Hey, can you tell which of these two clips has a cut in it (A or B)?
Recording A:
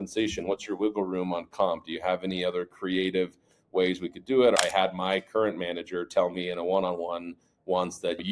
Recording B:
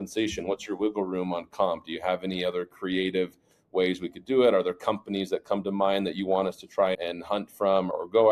A